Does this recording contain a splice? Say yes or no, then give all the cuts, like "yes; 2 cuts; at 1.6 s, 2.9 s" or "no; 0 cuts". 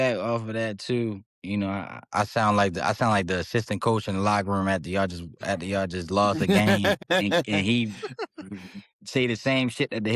yes; 2 cuts; at 1.3 s, 7.0 s